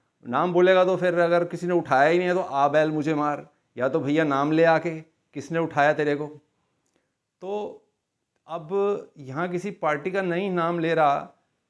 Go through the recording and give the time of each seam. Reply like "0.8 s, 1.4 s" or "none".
none